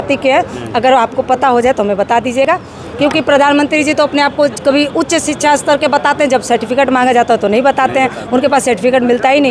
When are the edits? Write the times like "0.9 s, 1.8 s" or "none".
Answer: none